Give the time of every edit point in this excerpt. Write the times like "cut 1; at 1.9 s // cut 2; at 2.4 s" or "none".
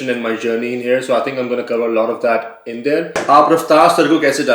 cut 1; at 3.2 s